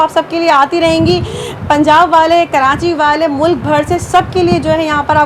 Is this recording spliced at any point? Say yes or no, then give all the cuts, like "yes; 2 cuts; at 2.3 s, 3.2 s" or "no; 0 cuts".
no; 0 cuts